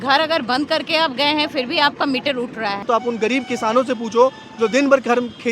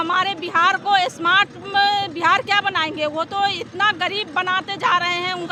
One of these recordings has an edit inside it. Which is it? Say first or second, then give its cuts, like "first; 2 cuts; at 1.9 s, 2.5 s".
first; 1 cut; at 2.8 s